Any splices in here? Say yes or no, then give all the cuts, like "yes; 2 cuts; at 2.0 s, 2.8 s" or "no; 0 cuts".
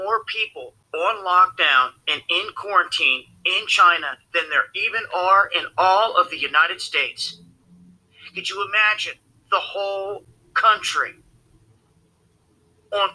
yes; 1 cut; at 8.9 s